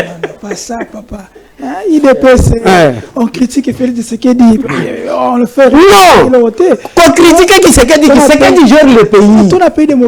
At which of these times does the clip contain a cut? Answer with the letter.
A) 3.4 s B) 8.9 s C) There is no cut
C